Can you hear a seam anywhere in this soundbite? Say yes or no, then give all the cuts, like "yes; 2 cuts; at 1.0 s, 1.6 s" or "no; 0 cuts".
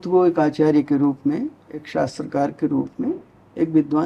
yes; 1 cut; at 1.9 s